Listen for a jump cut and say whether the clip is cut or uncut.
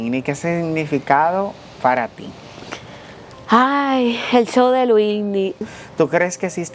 cut